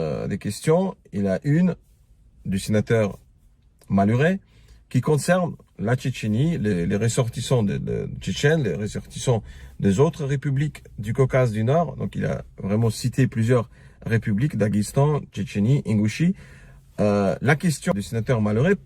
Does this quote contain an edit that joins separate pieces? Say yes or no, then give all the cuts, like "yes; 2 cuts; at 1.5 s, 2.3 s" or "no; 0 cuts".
yes; 1 cut; at 17.9 s